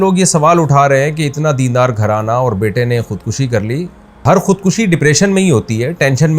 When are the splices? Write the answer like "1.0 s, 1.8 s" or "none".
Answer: 4.2 s